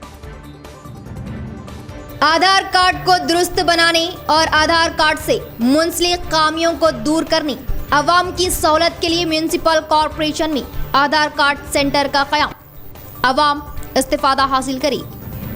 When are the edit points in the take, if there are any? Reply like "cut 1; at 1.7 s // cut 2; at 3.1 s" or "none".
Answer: cut 1; at 2.1 s